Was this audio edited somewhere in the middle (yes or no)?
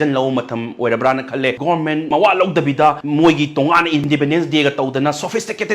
yes